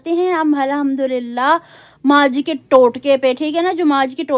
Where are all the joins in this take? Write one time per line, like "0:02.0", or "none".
none